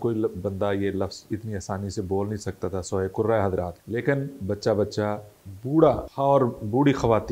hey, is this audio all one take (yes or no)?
no